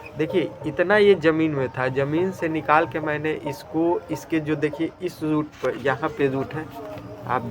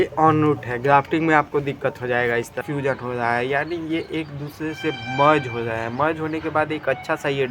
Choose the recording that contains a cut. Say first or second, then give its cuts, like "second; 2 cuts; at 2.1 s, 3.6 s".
second; 1 cut; at 2.6 s